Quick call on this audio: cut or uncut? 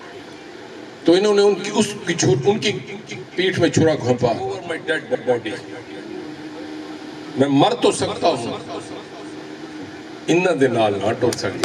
cut